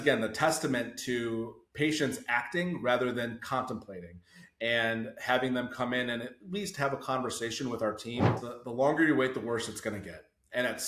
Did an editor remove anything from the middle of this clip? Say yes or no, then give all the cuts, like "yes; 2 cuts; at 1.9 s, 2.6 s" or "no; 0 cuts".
yes; 1 cut; at 8.5 s